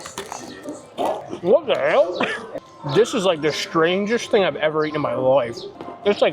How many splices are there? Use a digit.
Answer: 1